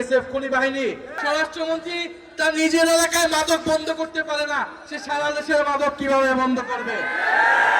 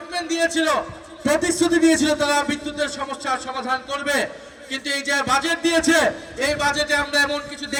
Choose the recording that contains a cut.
first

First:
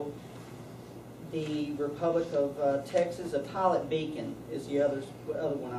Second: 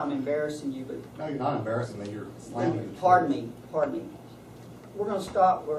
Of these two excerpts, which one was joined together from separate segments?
second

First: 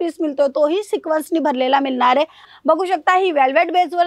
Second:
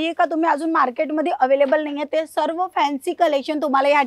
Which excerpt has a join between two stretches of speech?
first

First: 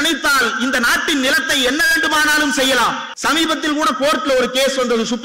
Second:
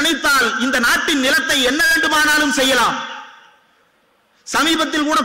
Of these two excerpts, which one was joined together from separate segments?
first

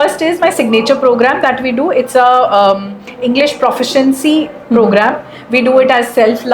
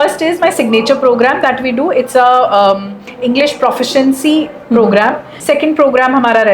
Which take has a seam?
second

